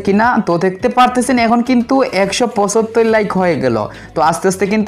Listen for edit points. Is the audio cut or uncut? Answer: uncut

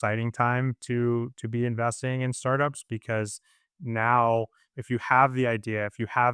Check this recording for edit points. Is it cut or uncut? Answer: uncut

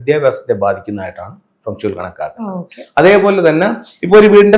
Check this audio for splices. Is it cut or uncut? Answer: uncut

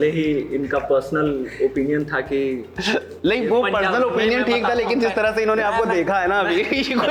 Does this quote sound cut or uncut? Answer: uncut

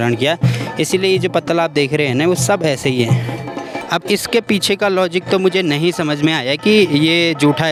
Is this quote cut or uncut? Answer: uncut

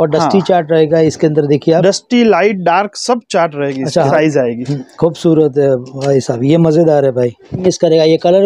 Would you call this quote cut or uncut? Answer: cut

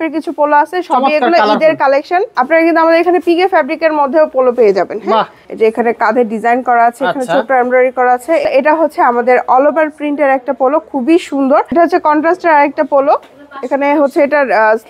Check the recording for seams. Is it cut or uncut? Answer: cut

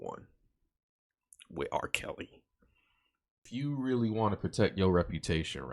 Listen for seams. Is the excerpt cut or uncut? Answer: cut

